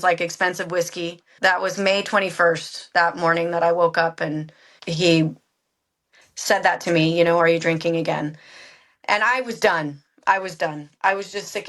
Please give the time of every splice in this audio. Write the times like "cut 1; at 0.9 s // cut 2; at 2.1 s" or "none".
cut 1; at 1.3 s